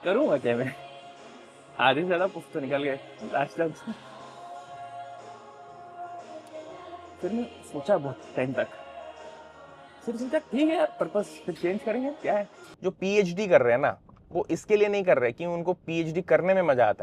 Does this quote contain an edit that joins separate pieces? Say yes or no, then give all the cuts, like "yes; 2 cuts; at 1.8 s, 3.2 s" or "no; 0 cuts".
yes; 1 cut; at 12.7 s